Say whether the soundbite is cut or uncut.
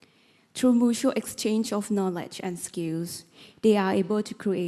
uncut